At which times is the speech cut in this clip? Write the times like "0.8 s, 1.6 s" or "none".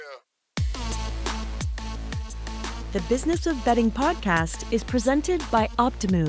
2.8 s